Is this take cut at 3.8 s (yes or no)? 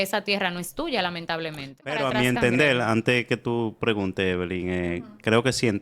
no